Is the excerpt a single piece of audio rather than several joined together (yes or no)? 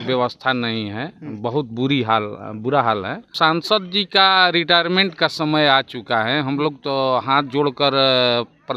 no